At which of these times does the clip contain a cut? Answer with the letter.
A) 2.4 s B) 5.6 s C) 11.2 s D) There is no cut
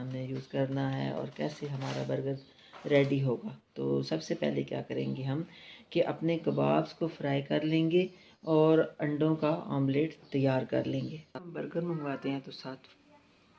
C